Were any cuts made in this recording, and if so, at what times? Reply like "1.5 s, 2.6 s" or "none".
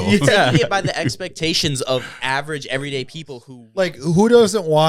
3.4 s